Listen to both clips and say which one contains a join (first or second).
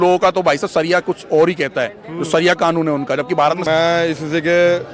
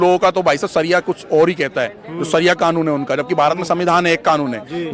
first